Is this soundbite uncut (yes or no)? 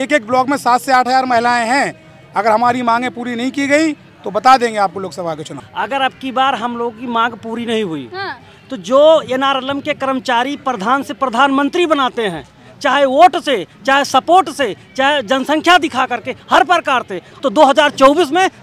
no